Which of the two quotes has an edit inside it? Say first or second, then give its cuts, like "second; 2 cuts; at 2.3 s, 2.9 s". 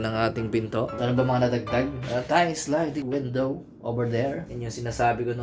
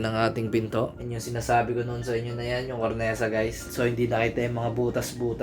second; 1 cut; at 0.9 s